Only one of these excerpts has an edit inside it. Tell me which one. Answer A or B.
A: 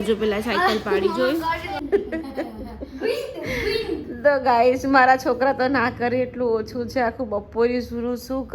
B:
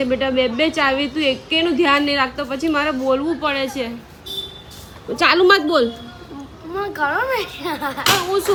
A